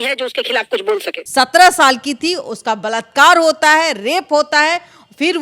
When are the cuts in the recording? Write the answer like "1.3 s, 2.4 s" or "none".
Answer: 1.2 s